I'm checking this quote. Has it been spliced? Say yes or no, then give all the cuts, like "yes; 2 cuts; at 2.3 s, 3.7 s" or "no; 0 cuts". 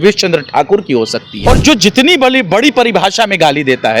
yes; 1 cut; at 1.3 s